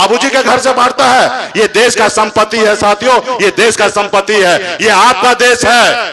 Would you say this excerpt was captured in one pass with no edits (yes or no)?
yes